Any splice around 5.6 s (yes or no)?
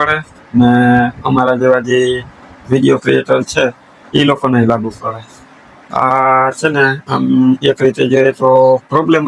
no